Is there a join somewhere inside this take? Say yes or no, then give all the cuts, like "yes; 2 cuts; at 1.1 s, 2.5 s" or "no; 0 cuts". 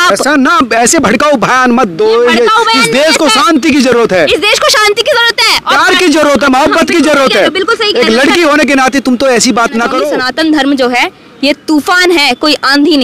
yes; 1 cut; at 10.2 s